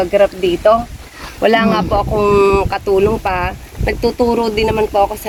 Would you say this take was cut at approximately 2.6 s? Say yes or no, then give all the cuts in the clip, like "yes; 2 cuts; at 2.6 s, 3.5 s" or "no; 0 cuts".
no; 0 cuts